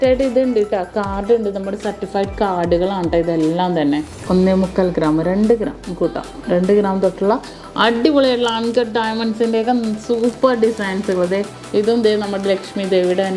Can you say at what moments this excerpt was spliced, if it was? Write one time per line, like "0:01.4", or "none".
0:04.1
0:11.6